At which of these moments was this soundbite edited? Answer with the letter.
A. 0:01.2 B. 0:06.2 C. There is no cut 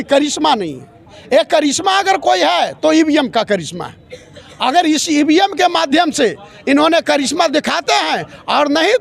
C